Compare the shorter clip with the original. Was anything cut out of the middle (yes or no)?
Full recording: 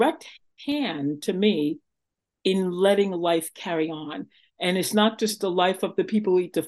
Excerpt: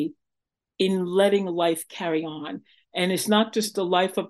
no